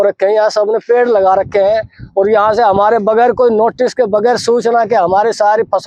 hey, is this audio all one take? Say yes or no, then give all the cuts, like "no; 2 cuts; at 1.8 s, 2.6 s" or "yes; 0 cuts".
yes; 0 cuts